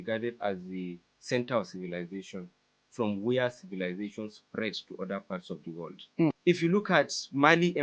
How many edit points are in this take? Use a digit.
1